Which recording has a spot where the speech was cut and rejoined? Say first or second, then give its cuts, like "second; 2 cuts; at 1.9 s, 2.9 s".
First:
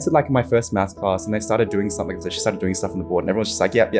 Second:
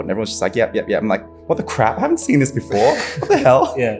first; 1 cut; at 2.3 s